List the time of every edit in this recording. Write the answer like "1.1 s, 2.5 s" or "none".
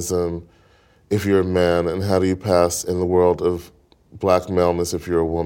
none